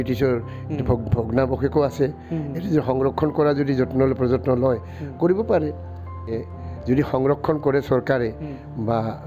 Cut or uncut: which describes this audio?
cut